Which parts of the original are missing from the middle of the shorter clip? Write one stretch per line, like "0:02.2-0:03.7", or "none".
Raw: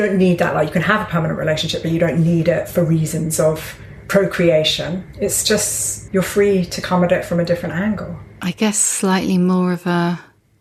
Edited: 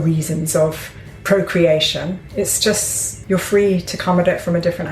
none